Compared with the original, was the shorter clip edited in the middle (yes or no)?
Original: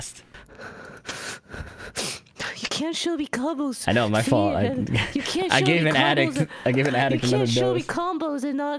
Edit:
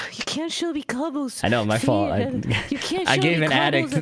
no